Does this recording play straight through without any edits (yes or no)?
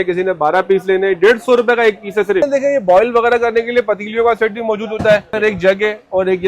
no